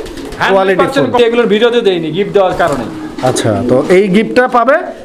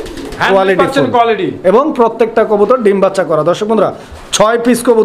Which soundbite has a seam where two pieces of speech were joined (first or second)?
first